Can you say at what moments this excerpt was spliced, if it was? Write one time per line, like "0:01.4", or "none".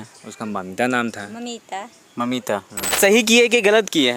0:03.0